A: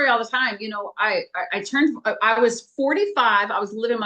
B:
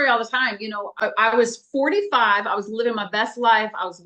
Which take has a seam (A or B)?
B